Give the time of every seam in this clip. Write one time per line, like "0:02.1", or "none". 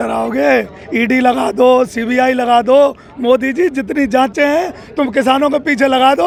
none